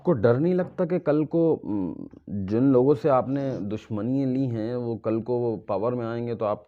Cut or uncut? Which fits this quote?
uncut